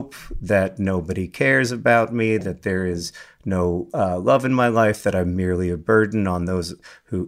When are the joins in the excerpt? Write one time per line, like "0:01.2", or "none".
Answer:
none